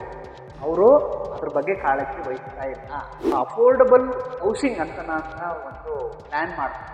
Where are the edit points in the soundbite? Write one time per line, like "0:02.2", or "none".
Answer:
0:03.3